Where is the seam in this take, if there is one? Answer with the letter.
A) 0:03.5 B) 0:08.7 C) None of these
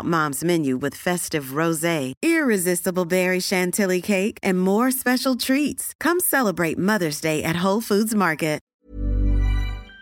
B